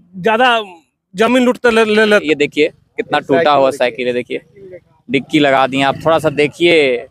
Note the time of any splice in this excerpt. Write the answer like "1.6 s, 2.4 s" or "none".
2.2 s